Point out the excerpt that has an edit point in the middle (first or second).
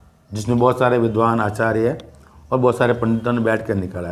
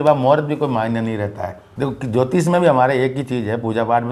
second